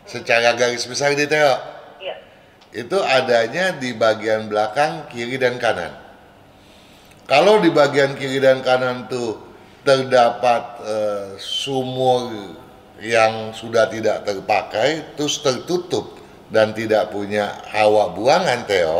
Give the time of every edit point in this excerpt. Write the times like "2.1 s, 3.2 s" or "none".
none